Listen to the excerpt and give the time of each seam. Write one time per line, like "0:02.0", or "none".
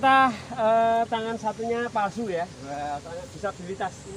none